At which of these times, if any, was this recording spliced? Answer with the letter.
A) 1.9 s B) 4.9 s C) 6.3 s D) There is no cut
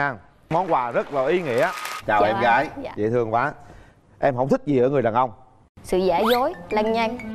A